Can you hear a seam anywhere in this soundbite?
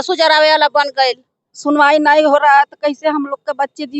yes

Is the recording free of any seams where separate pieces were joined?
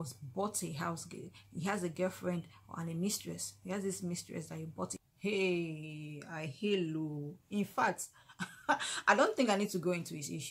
no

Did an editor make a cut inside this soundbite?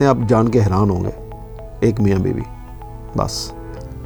no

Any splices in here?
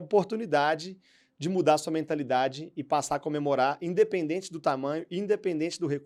no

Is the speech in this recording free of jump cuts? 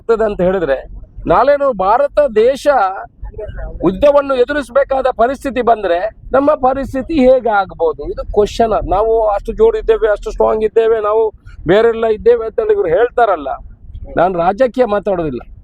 yes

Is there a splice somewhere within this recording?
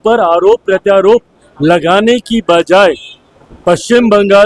no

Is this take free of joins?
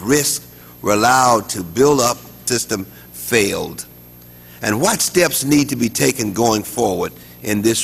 yes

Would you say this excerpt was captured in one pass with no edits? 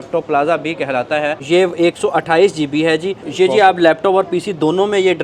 no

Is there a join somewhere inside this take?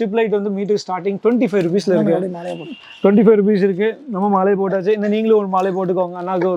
no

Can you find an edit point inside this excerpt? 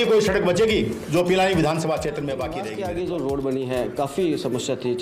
yes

